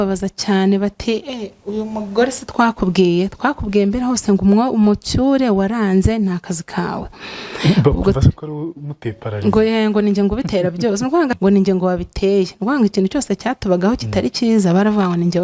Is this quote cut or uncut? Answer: cut